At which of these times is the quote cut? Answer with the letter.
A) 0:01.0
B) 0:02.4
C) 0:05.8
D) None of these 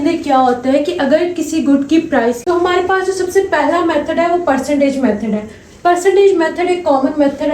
B